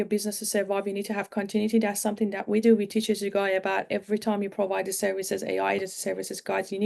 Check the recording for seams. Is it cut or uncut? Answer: uncut